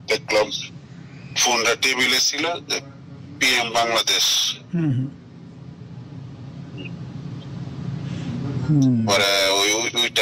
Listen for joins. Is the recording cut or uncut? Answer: uncut